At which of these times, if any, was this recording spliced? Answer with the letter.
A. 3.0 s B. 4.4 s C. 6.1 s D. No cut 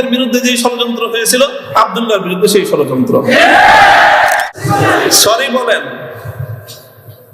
B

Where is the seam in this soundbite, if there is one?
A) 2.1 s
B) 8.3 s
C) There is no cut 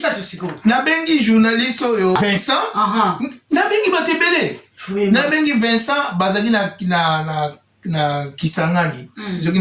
A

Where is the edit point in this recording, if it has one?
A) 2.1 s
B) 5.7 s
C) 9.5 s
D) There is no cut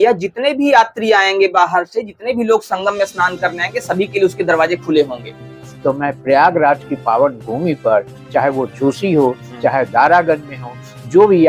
B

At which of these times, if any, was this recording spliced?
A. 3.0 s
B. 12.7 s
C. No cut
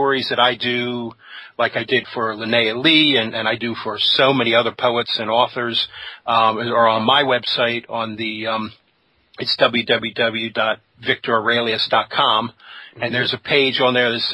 A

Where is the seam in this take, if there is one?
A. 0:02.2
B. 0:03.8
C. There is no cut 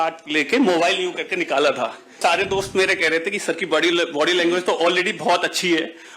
A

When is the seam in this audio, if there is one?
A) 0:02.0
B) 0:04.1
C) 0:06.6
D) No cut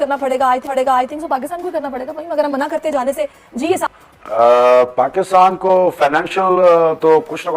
D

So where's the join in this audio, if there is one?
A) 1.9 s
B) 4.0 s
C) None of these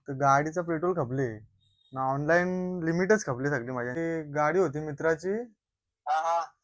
B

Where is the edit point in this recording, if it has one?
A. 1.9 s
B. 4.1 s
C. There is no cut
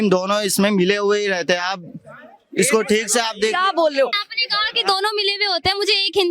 B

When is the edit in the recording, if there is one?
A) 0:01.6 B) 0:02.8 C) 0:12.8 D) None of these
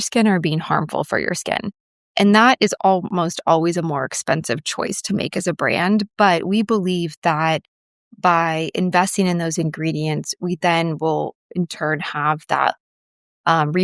B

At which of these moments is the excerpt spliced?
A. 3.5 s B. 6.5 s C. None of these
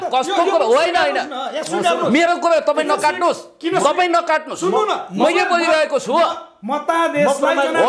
C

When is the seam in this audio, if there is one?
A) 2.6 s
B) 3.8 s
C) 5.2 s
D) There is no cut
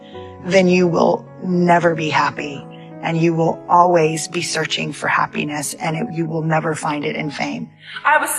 D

